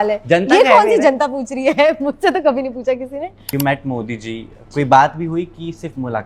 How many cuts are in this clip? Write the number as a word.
one